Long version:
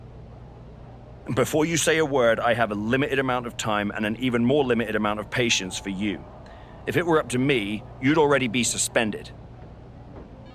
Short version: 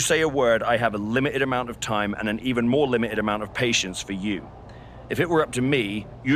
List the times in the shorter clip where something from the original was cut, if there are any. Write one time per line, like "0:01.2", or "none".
none